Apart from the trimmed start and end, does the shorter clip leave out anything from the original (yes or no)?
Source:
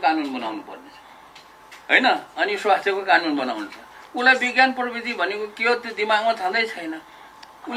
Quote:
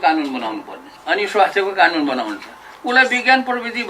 yes